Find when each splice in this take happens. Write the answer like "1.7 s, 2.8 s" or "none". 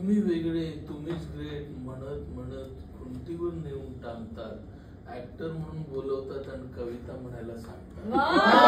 none